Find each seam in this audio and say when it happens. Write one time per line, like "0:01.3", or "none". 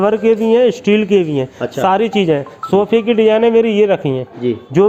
none